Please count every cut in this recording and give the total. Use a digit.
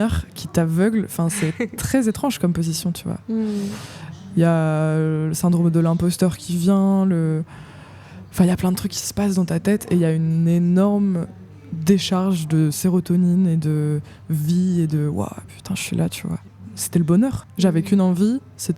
2